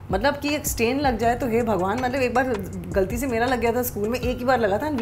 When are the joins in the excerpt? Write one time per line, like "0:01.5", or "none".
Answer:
none